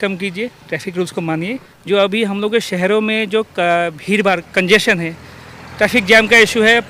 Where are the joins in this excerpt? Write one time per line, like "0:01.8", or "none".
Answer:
0:01.7